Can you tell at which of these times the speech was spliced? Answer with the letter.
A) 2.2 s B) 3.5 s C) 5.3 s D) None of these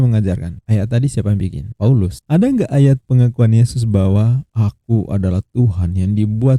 D